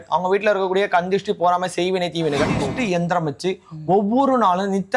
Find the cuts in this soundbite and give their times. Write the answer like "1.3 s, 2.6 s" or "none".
2.7 s